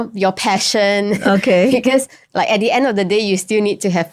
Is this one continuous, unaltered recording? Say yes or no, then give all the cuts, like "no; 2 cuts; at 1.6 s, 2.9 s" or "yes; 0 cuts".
yes; 0 cuts